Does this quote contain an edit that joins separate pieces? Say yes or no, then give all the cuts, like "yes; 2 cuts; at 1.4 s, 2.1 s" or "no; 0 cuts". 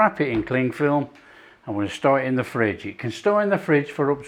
no; 0 cuts